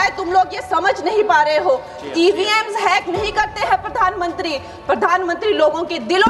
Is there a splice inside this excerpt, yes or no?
no